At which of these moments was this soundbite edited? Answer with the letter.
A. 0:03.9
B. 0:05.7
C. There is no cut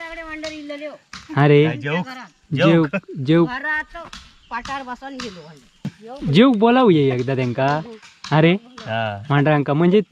B